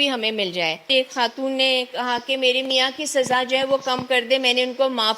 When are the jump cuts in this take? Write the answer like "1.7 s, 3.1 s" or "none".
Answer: 0.9 s